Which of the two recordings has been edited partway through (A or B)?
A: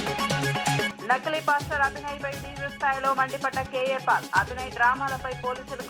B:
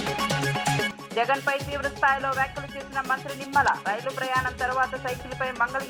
B